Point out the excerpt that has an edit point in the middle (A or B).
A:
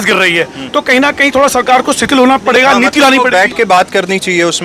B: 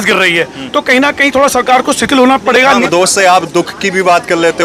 B